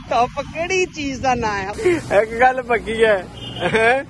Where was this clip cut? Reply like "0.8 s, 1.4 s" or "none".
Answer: 1.7 s